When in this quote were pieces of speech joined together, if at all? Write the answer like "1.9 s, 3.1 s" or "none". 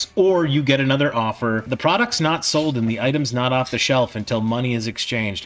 1.7 s